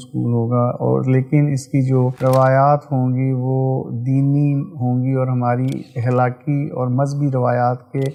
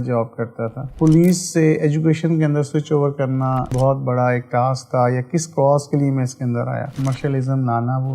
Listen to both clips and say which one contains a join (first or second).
second